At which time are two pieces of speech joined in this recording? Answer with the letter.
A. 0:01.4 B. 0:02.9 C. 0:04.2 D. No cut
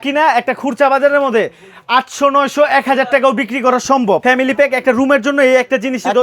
C